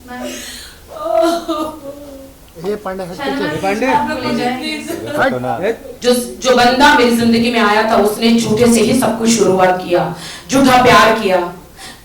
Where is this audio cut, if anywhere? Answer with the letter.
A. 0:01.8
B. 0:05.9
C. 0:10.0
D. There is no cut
B